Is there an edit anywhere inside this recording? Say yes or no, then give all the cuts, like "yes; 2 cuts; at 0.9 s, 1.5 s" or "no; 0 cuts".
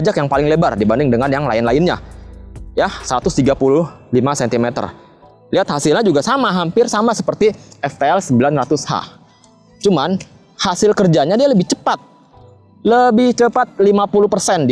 no; 0 cuts